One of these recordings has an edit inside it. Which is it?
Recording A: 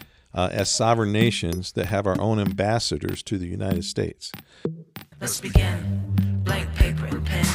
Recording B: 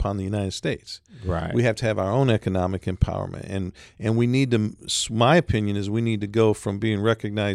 A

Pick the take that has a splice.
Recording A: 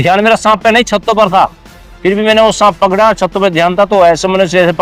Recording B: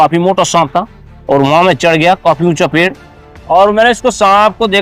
B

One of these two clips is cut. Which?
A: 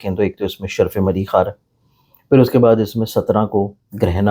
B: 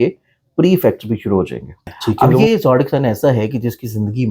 B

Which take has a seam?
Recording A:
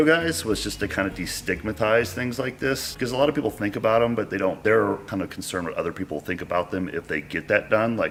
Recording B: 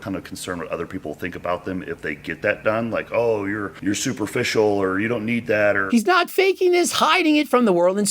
B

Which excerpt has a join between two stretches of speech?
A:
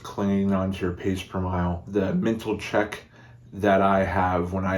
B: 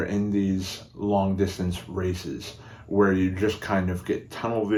A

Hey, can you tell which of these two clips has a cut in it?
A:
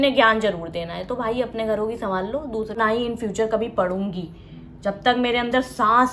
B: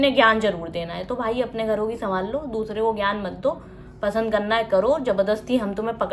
A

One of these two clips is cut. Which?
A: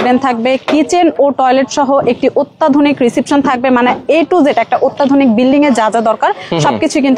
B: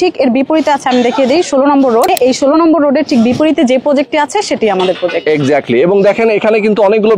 B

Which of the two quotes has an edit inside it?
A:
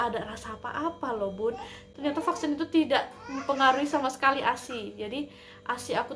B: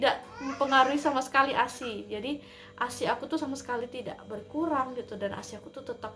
A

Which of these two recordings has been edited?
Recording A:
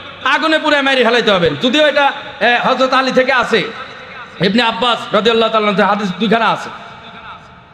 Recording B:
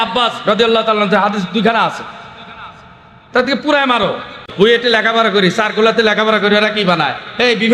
B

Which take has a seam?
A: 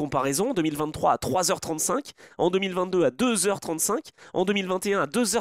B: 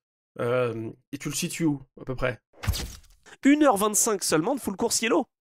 B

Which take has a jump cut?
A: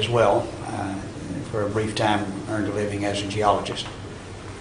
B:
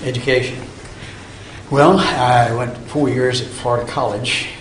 A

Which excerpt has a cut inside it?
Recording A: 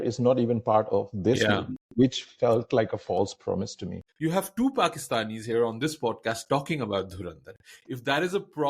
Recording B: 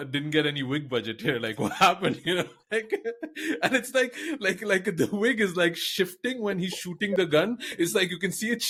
A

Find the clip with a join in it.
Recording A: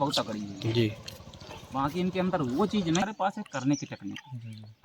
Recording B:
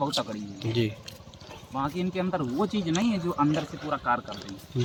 A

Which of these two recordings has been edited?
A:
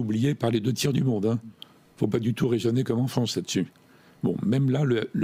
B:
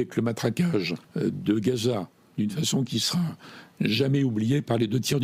B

